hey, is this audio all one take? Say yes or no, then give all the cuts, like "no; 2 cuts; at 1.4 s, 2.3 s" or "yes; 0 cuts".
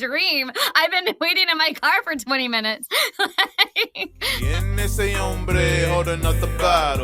no; 1 cut; at 4.5 s